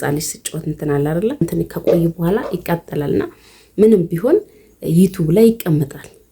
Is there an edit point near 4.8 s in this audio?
no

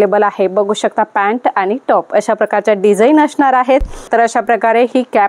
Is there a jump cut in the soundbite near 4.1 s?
yes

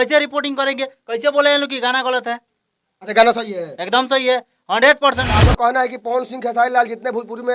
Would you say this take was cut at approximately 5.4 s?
yes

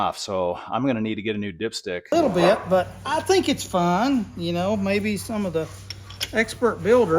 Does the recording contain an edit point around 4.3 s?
no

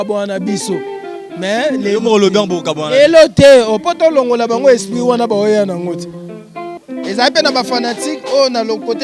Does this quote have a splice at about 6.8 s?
yes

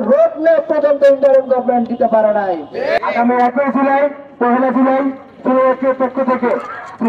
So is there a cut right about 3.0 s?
yes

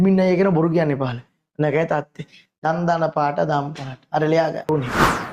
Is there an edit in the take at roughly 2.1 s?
no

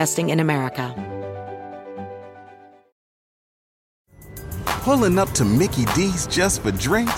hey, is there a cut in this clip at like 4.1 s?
no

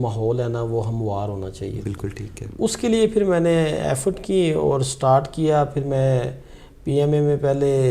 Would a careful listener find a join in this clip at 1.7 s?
no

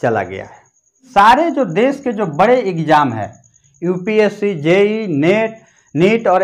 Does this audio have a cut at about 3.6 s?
no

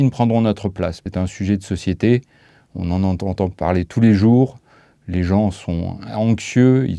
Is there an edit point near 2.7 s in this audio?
no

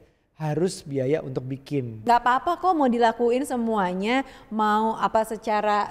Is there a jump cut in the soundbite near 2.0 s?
yes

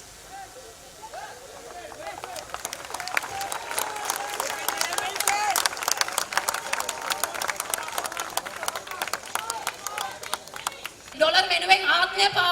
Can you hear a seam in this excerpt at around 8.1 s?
no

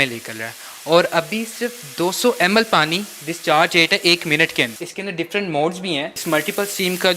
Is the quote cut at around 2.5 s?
no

